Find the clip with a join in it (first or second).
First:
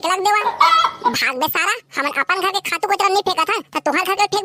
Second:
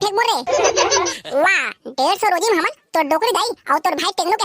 second